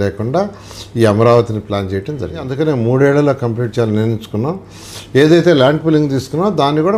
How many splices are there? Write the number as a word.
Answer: one